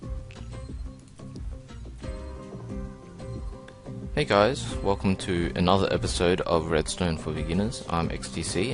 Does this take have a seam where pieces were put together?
yes; 1 cut; at 3.7 s

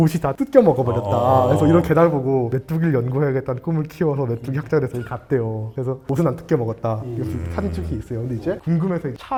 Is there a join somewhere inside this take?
no; 0 cuts

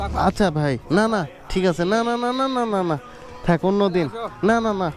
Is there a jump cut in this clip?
no; 0 cuts

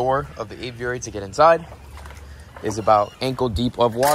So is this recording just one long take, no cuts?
no; 1 cut; at 3.1 s

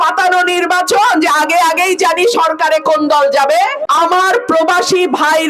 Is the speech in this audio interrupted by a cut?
yes; 1 cut; at 3.8 s

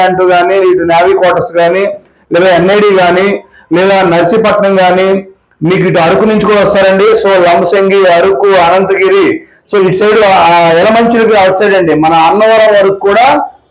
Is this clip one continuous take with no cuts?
yes; 0 cuts

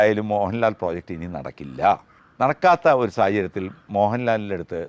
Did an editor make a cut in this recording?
yes; 1 cut; at 2.2 s

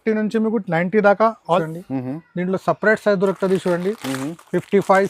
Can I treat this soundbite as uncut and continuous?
no; 1 cut; at 1.6 s

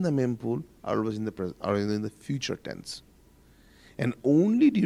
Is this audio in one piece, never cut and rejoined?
yes; 0 cuts

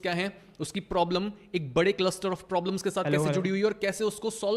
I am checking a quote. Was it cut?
no; 0 cuts

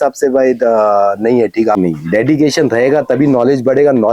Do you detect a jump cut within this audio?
yes; 1 cut; at 1.8 s

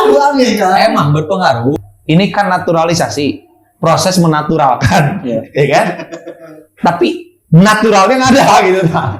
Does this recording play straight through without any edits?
no; 1 cut; at 1.7 s

